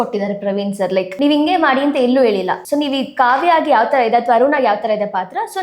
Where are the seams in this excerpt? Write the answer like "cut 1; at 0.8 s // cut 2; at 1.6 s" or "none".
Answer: cut 1; at 1.1 s // cut 2; at 2.6 s